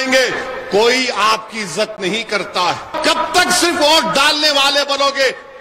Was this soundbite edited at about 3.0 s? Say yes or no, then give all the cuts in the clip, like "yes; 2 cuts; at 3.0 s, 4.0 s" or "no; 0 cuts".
yes; 1 cut; at 3.0 s